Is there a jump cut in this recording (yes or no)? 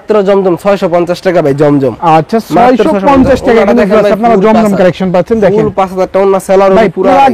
no